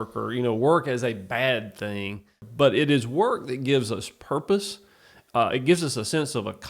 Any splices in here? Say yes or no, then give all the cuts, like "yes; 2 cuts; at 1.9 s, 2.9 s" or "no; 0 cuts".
yes; 1 cut; at 2.4 s